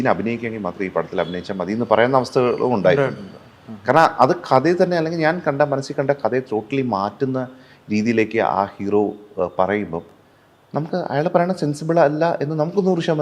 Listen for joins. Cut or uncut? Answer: uncut